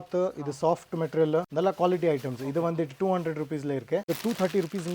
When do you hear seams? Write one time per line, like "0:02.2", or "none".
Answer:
0:01.5
0:04.1